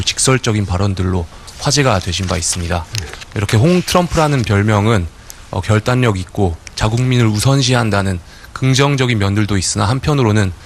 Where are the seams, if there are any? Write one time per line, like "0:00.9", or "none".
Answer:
none